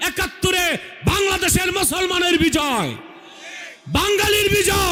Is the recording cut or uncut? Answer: uncut